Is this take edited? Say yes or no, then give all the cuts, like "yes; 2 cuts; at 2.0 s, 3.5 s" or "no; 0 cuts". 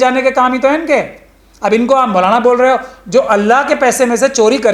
no; 0 cuts